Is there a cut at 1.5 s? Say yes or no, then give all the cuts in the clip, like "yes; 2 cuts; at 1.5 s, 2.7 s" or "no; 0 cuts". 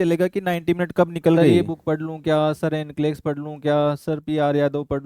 yes; 1 cut; at 1.5 s